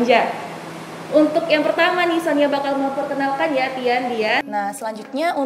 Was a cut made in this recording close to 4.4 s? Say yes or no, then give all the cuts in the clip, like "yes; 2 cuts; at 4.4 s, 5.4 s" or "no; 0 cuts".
yes; 1 cut; at 4.4 s